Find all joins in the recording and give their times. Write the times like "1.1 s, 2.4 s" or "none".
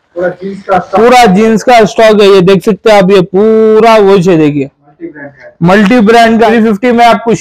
6.5 s